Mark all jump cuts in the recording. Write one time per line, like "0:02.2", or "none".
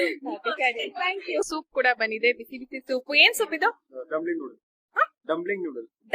0:01.5

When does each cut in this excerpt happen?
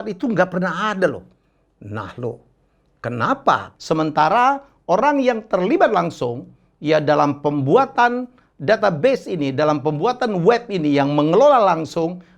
0:03.7

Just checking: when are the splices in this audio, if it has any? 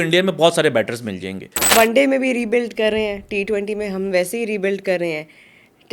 0:01.7

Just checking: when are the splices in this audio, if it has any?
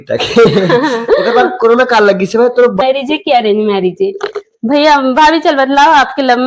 0:02.8

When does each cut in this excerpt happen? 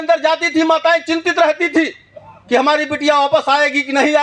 none

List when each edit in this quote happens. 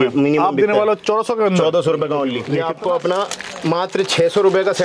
0:02.4

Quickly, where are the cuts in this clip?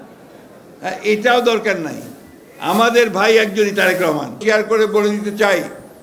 0:04.4

